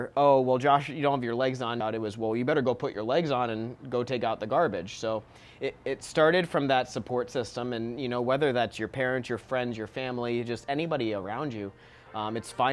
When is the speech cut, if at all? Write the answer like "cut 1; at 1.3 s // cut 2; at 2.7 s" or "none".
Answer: cut 1; at 1.8 s